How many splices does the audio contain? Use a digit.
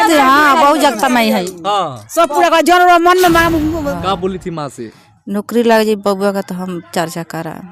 1